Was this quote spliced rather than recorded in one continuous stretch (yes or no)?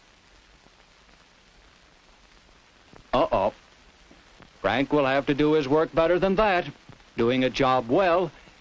no